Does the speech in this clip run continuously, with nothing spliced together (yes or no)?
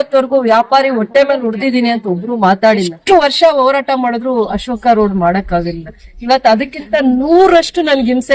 no